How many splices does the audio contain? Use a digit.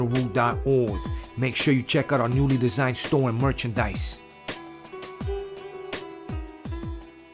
1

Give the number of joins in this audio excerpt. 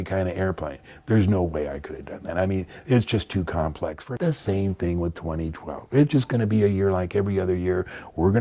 1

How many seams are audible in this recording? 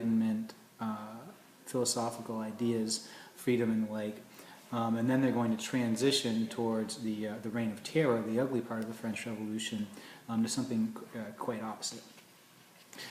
1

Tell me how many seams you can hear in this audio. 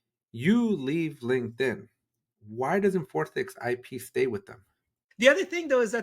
1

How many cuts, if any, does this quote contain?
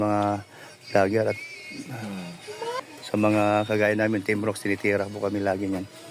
1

